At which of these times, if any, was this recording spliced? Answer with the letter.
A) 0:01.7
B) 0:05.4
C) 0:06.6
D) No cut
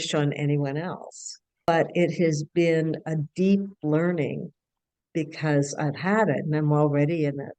A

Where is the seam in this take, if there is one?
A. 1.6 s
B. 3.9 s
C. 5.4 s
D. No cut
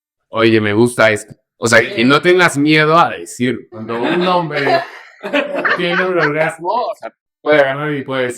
B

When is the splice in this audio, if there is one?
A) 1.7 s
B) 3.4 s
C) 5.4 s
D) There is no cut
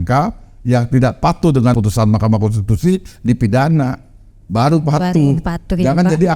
A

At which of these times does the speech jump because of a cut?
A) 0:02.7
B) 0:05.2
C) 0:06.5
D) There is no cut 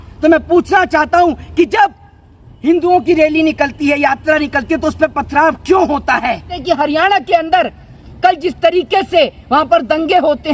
C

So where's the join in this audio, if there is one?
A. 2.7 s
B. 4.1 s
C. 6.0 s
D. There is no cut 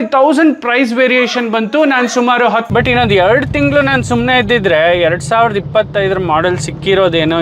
A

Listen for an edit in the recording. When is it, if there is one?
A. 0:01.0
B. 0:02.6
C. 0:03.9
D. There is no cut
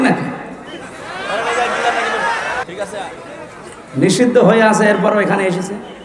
B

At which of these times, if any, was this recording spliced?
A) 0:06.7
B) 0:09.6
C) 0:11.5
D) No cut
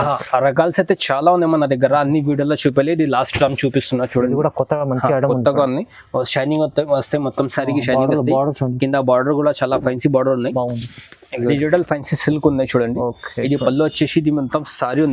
C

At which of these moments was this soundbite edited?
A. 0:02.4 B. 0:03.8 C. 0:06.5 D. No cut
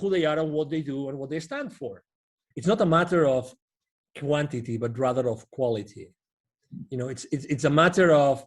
A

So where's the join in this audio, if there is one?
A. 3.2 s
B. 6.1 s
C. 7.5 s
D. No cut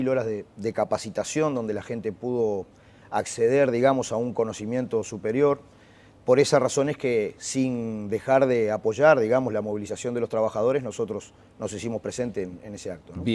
D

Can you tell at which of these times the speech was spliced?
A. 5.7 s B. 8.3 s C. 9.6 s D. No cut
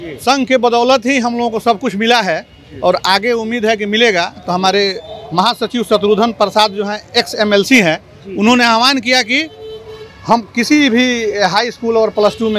D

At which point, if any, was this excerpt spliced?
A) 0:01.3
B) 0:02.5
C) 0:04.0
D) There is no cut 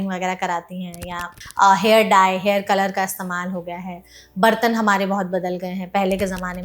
A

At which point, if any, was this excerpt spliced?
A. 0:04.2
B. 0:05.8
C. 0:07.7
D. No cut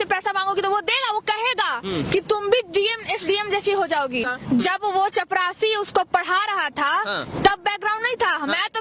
A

